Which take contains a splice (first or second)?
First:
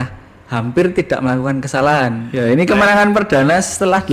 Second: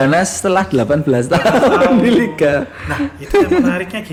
first